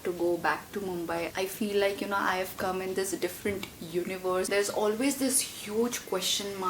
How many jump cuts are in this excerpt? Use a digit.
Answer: 2